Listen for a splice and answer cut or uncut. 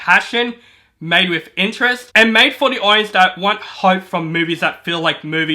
cut